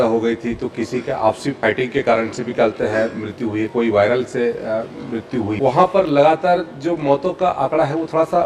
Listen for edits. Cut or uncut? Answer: cut